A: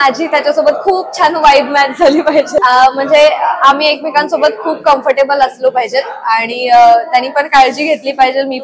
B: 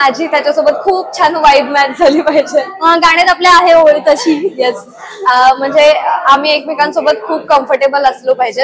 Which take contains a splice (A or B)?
A